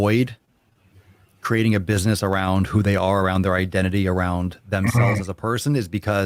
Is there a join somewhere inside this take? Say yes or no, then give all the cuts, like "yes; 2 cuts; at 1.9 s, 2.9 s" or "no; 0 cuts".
no; 0 cuts